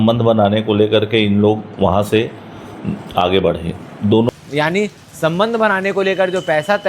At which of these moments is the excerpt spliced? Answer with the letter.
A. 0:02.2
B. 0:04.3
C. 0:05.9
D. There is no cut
B